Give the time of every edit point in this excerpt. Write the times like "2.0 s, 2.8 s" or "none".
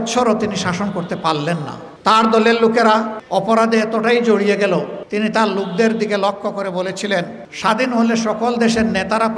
1.8 s, 3.2 s, 5.0 s, 7.4 s